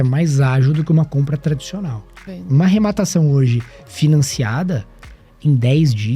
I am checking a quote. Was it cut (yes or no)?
yes